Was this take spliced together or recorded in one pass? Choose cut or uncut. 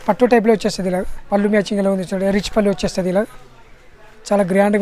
cut